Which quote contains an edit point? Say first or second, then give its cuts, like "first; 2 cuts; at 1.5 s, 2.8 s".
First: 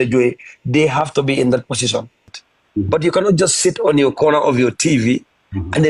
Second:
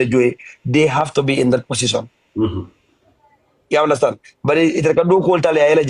first; 1 cut; at 2.3 s